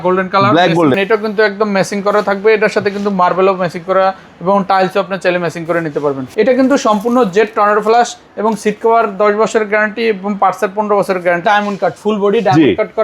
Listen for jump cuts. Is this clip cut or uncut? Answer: cut